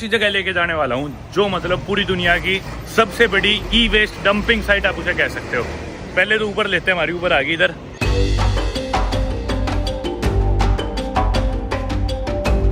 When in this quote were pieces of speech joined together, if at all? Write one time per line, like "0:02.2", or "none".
none